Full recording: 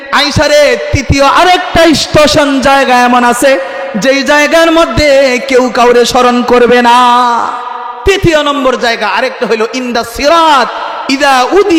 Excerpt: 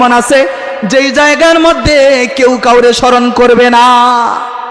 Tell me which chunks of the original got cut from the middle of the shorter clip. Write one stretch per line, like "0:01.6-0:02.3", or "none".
none